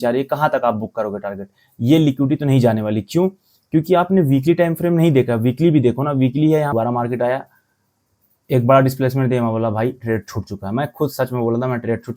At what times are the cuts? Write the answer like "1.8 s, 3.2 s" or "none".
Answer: 6.7 s